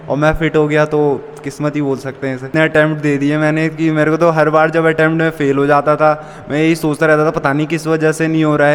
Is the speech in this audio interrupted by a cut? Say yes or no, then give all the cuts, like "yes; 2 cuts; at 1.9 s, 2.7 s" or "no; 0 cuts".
yes; 1 cut; at 2.5 s